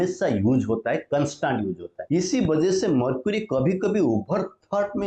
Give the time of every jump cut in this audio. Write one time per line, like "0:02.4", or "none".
0:01.9